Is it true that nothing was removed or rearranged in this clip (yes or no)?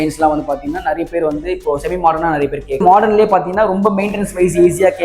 no